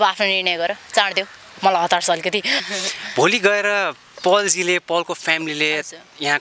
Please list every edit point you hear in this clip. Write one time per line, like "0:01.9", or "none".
0:02.6